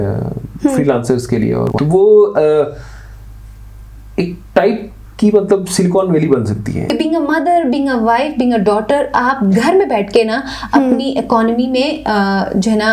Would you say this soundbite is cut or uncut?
cut